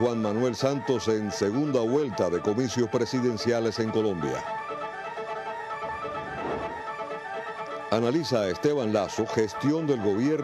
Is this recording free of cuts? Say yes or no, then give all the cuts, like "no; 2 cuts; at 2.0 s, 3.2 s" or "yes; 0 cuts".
yes; 0 cuts